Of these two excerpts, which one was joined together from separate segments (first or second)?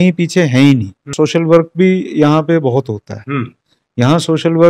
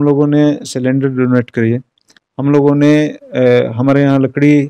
first